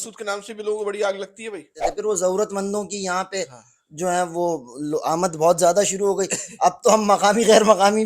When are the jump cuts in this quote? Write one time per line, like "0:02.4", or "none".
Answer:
0:01.8

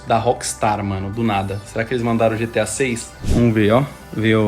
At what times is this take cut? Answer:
0:03.1

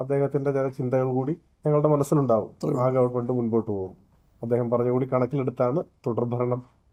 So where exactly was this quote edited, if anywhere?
none

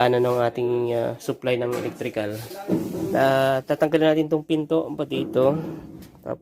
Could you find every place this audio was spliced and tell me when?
0:02.5

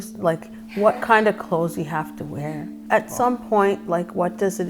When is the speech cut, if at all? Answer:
0:02.7

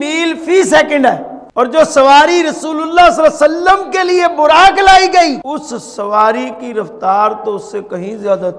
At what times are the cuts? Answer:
0:01.4
0:05.4

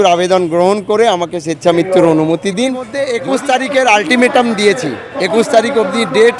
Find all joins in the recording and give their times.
0:03.0

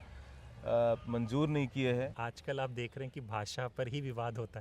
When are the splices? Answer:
0:02.2

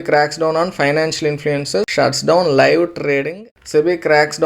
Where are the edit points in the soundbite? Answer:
0:01.9
0:03.5

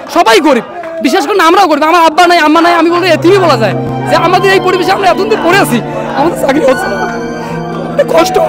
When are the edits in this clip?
none

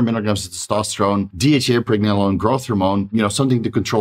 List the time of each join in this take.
0:01.3
0:03.1

